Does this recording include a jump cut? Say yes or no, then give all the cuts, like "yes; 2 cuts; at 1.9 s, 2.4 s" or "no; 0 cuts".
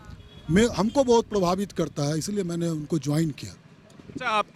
no; 0 cuts